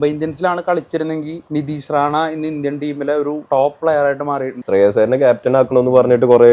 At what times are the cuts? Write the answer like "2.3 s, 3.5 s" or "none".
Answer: 1.4 s, 3.4 s, 4.5 s